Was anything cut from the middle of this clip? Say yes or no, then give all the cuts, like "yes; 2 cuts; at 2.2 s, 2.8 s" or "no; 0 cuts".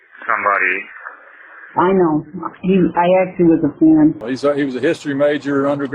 yes; 1 cut; at 4.2 s